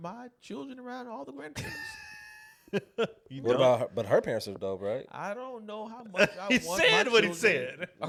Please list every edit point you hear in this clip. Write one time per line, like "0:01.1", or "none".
none